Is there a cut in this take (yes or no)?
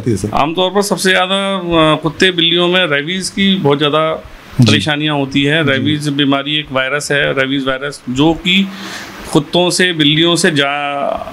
no